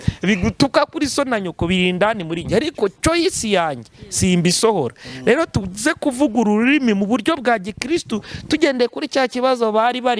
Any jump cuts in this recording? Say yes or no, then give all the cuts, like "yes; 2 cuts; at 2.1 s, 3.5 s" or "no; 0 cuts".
no; 0 cuts